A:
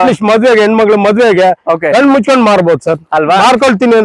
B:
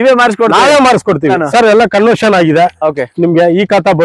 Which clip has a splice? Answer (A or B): B